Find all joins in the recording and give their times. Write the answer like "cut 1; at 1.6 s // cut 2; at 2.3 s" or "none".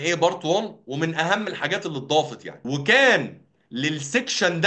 cut 1; at 2.5 s